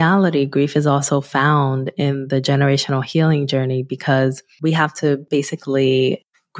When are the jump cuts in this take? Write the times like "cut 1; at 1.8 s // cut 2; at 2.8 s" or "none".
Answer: cut 1; at 4.5 s // cut 2; at 5.2 s